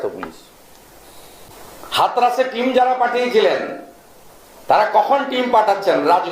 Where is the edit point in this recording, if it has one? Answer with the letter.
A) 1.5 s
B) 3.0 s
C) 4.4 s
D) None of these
A